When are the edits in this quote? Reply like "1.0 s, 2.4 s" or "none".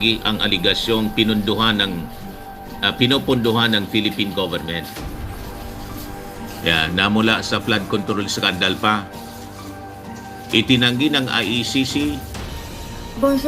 12.4 s